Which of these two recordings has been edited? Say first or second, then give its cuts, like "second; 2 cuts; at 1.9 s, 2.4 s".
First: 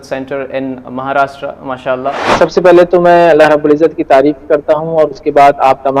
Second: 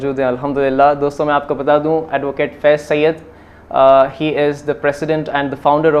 first; 1 cut; at 2.2 s